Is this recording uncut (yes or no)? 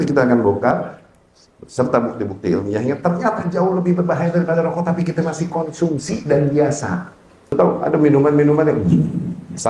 no